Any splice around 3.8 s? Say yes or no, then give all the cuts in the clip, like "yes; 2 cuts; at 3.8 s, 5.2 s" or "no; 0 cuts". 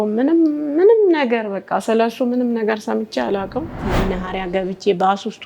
yes; 1 cut; at 3.8 s